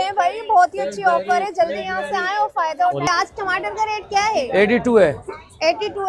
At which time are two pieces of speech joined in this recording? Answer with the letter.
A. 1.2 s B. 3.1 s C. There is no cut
B